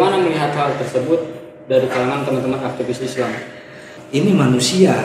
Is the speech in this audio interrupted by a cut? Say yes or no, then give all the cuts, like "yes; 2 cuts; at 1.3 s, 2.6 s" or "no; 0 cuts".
yes; 1 cut; at 4.0 s